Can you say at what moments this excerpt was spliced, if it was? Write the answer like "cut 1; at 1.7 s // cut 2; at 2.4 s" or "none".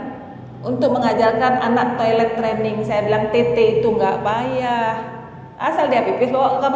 none